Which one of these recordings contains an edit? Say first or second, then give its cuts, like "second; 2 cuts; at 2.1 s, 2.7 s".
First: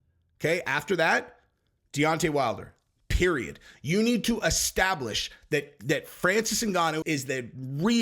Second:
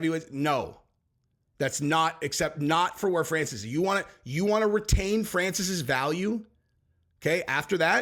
first; 1 cut; at 7.0 s